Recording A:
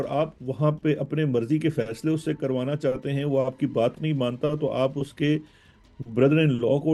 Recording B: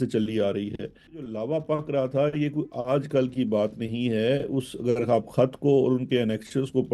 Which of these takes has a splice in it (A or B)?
B